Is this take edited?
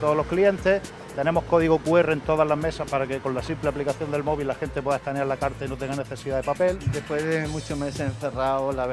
yes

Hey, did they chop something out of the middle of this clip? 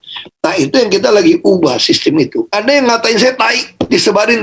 yes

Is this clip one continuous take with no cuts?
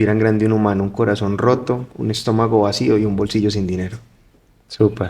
yes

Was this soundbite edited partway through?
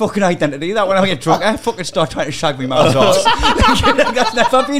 no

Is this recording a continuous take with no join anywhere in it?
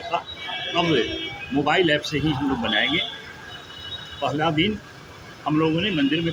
yes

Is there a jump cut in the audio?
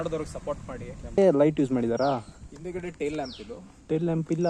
yes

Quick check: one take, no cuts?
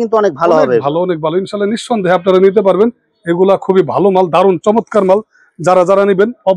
yes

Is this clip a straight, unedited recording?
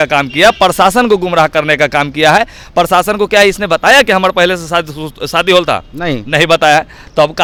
yes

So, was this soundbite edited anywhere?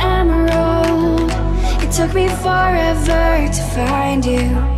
no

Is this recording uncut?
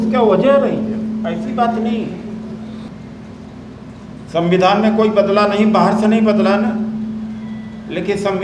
no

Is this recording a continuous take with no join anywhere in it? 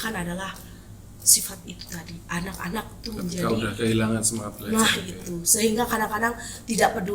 yes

